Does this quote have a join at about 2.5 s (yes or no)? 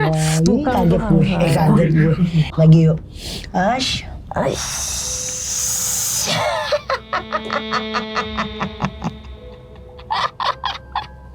yes